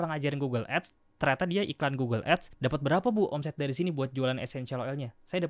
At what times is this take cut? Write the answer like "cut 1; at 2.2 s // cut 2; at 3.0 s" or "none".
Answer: cut 1; at 2.5 s